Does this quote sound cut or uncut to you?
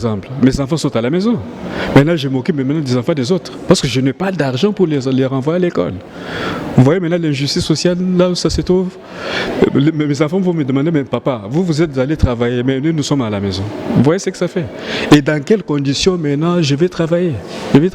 uncut